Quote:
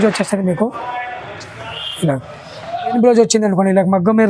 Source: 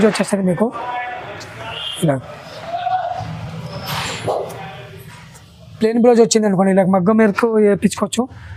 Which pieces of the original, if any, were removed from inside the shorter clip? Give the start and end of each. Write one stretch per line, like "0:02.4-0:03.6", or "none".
0:02.9-0:05.9